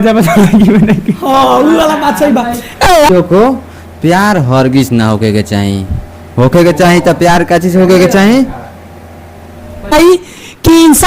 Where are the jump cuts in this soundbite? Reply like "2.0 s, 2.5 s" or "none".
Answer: 3.1 s, 9.9 s